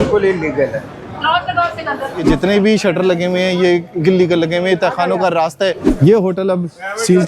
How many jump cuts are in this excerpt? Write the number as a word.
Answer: two